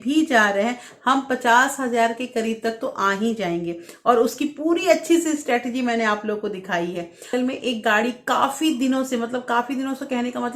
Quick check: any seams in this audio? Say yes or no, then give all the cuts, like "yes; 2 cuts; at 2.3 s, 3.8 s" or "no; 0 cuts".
yes; 1 cut; at 7.3 s